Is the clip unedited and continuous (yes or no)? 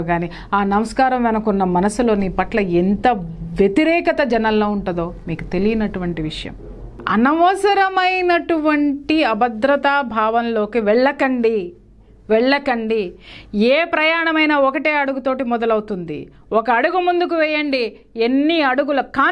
no